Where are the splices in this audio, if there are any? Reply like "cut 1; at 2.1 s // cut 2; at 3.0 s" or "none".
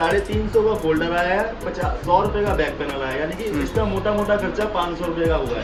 none